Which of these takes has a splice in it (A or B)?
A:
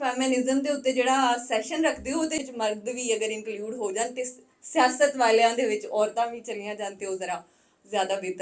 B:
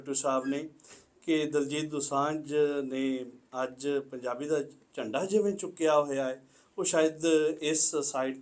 A